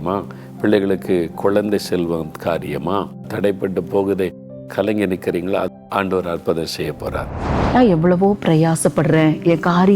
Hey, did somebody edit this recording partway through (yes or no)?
yes